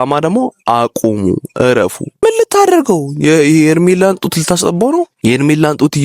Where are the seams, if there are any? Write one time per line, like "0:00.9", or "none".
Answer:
0:02.2
0:05.1